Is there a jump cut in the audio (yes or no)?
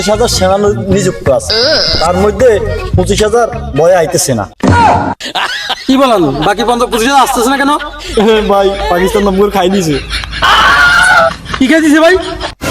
no